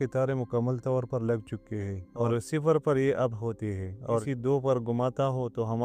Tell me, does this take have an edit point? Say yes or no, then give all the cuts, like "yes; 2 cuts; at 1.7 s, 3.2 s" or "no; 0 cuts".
yes; 2 cuts; at 2.2 s, 4.2 s